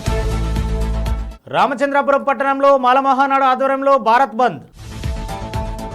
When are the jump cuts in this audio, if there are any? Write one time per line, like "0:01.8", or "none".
0:01.2